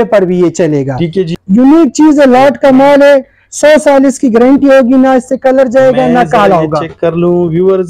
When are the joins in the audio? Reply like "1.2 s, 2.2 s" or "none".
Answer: 1.3 s